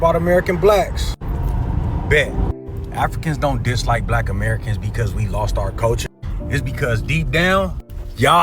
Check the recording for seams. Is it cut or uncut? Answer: uncut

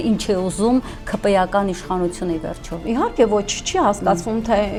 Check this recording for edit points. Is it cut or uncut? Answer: uncut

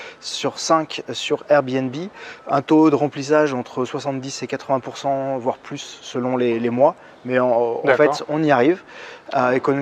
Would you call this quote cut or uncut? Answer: uncut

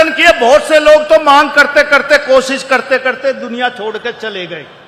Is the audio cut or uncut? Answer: uncut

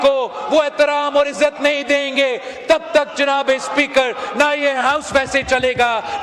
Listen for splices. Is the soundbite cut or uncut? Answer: uncut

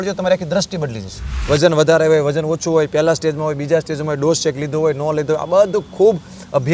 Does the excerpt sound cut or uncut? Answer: cut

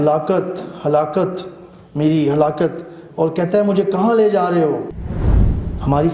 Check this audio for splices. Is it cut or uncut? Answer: cut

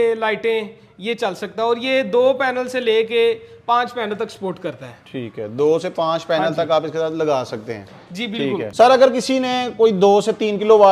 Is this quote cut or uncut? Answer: uncut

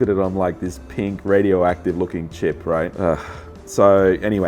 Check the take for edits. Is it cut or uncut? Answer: uncut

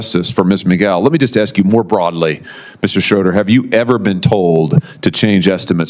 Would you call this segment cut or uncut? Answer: uncut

